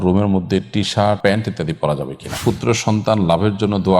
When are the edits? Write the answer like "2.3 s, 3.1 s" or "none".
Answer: 1.2 s, 2.4 s